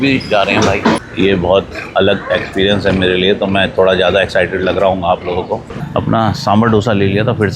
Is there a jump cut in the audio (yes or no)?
yes